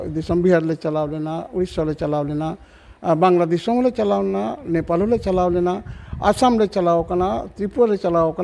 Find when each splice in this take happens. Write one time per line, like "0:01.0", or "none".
none

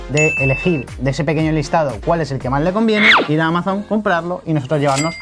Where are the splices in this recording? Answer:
none

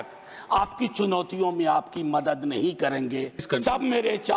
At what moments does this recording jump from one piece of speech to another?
0:03.4

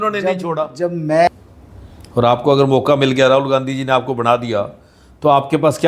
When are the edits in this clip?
0:01.3

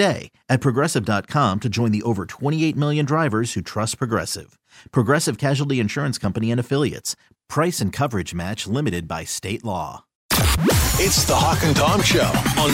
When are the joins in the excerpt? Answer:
0:10.2

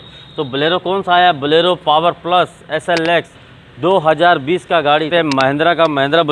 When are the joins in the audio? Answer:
0:03.3
0:05.1

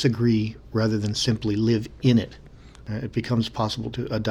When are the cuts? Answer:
none

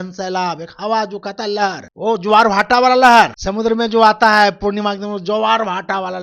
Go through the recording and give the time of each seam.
0:01.9
0:03.4

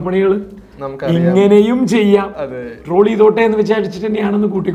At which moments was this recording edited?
none

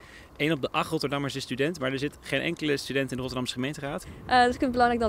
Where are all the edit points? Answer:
0:04.0

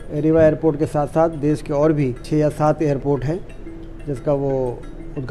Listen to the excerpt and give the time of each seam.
0:02.2

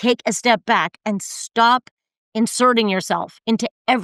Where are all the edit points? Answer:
none

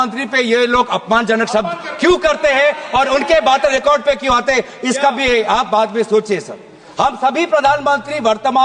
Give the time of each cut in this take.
none

